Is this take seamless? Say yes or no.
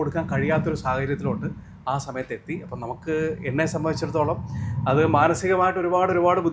yes